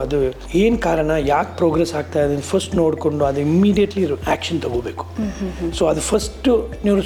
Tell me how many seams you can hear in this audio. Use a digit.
0